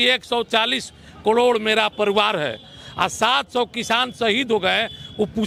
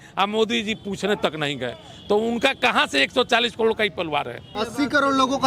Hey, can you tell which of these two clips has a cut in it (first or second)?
second